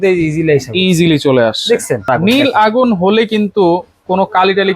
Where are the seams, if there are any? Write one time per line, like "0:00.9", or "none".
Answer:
0:02.1